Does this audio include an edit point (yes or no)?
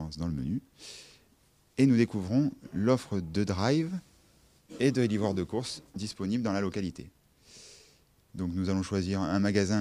yes